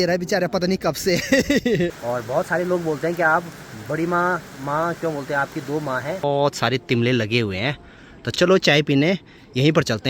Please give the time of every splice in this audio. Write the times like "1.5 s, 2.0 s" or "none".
1.9 s, 6.2 s